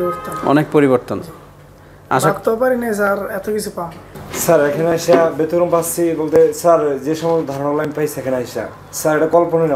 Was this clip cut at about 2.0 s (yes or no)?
no